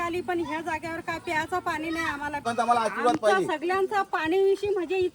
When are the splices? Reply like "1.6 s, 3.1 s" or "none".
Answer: 2.5 s